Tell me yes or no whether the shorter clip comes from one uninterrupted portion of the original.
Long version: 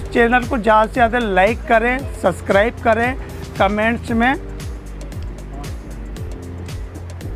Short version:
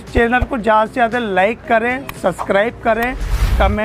yes